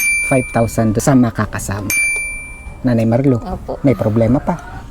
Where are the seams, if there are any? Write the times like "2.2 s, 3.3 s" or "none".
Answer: 1.0 s